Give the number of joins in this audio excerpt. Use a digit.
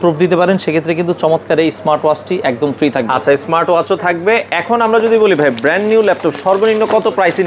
0